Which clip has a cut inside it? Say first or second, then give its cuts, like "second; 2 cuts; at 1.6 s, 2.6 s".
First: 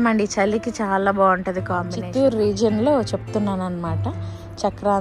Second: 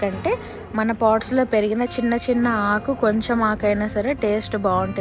first; 1 cut; at 2.1 s